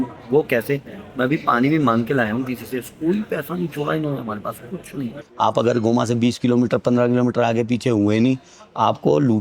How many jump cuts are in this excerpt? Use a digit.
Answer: 1